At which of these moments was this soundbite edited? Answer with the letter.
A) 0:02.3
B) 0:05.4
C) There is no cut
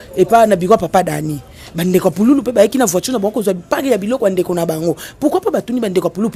C